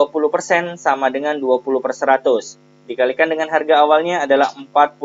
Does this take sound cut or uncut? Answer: uncut